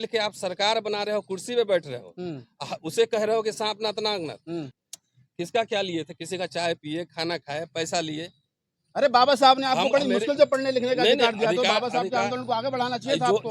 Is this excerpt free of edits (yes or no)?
no